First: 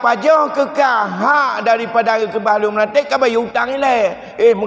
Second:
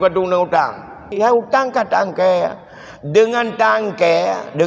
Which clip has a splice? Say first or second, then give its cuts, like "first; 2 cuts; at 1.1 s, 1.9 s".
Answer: second; 1 cut; at 1.1 s